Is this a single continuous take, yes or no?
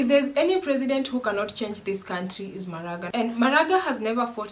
no